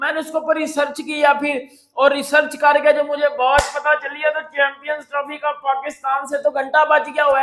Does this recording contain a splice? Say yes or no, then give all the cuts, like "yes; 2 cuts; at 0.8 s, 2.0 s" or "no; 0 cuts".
no; 0 cuts